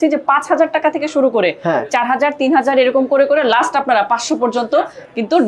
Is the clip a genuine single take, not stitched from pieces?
yes; 0 cuts

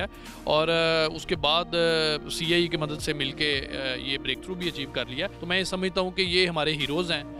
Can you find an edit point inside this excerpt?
yes; 1 cut; at 5.4 s

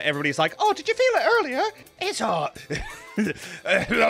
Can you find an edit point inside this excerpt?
yes; 1 cut; at 1.8 s

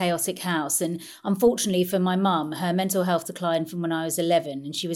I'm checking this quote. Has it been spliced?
no; 0 cuts

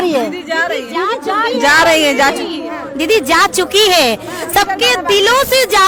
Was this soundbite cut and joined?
no; 0 cuts

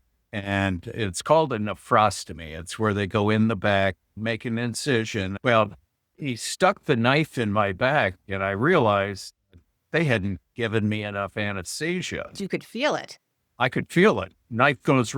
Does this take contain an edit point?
yes; 2 cuts; at 5.3 s, 12.4 s

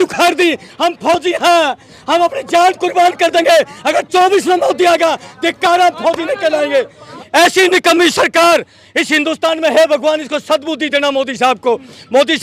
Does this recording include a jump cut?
yes; 1 cut; at 7.1 s

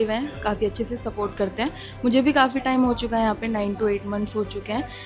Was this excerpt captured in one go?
yes; 0 cuts

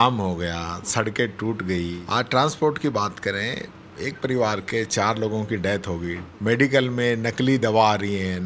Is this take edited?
yes; 2 cuts; at 2.0 s, 6.3 s

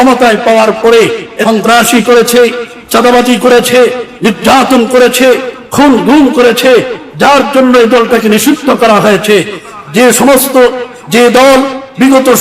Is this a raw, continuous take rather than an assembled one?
no; 1 cut; at 1.3 s

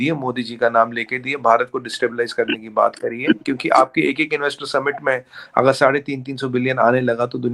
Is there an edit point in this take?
no; 0 cuts

